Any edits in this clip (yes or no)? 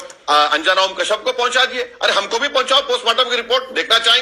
no